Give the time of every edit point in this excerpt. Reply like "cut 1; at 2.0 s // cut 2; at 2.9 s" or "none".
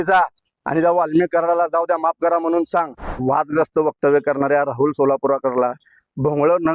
cut 1; at 3.1 s